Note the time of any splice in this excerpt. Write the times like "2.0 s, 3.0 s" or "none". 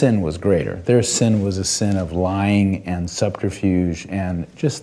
none